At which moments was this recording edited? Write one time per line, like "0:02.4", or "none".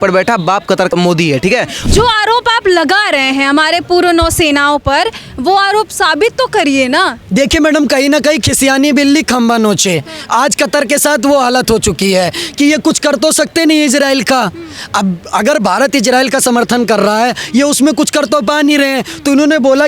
0:01.8